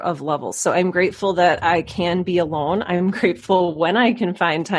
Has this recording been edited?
no; 0 cuts

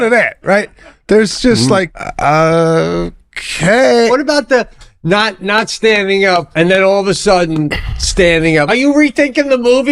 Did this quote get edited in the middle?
yes; 4 cuts; at 2.0 s, 4.1 s, 6.5 s, 8.7 s

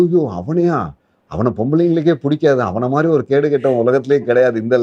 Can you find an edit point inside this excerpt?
no; 0 cuts

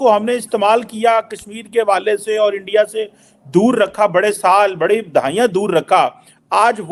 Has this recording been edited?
no; 0 cuts

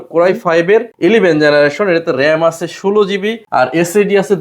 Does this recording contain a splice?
yes; 1 cut; at 3.4 s

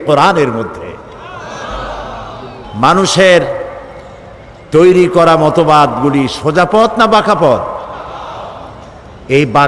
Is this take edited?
yes; 1 cut; at 2.6 s

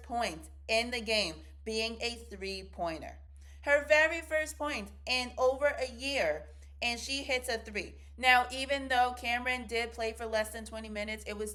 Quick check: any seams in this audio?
no; 0 cuts

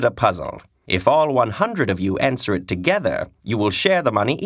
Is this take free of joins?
no; 1 cut; at 3.1 s

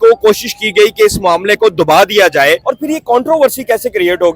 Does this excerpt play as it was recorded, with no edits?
no; 1 cut; at 2.6 s

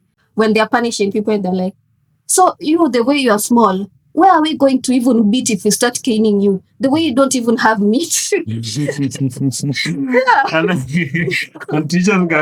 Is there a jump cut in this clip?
no; 0 cuts

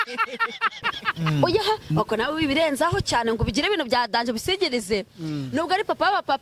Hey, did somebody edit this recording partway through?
yes; 1 cut; at 1.0 s

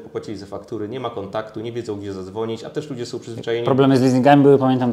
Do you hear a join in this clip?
no; 0 cuts

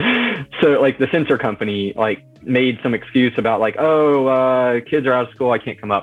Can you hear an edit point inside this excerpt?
no; 0 cuts

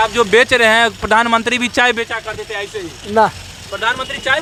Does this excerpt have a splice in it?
no; 0 cuts

